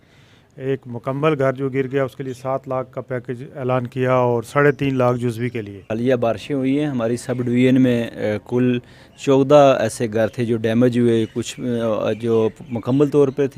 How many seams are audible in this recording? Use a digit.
1